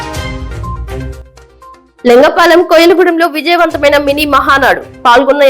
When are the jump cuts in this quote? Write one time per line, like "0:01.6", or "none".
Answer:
0:01.7